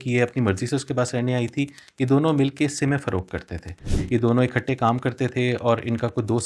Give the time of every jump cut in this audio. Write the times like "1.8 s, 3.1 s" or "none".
none

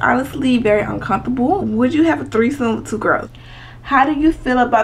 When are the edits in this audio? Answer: 1.6 s, 3.3 s

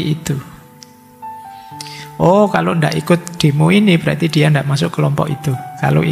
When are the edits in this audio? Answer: none

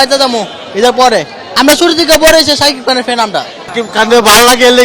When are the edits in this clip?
1.5 s, 3.6 s

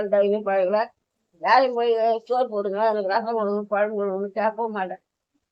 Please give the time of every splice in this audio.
none

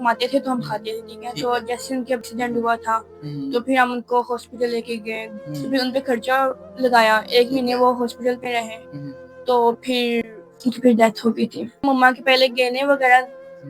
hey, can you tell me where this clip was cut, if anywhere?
2.2 s, 5.3 s, 11.8 s

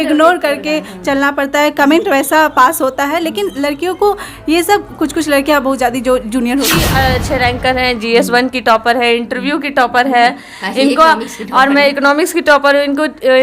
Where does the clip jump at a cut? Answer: 6.8 s

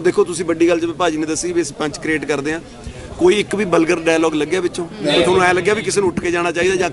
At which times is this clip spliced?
none

